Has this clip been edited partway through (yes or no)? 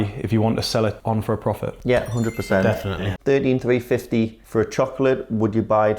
yes